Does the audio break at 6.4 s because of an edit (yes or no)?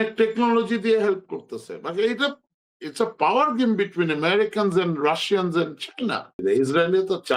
yes